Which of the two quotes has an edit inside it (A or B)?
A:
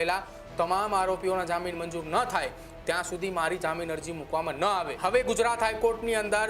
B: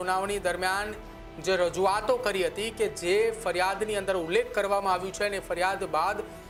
A